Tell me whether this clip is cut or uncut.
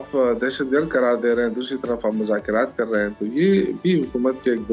uncut